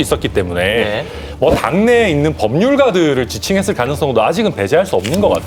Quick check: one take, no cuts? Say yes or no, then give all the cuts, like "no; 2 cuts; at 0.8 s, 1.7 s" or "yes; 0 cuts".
yes; 0 cuts